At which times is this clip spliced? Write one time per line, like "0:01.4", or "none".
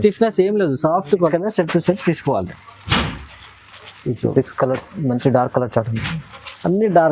0:01.3